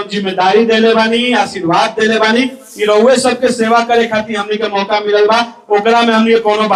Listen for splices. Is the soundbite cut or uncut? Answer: uncut